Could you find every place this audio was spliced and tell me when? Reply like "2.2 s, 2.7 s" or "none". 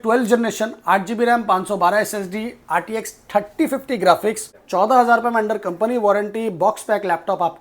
4.5 s